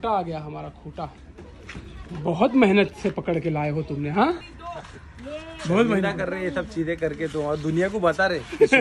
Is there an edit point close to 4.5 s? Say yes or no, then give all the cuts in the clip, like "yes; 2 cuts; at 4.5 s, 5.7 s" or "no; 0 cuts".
yes; 1 cut; at 4.5 s